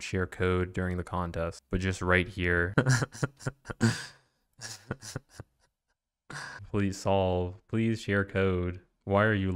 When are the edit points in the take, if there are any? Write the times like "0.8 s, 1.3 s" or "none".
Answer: 1.6 s, 2.7 s, 6.6 s